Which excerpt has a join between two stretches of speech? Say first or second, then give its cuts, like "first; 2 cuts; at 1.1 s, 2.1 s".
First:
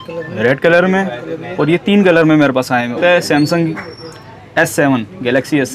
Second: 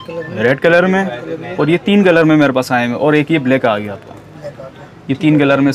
first; 1 cut; at 3.0 s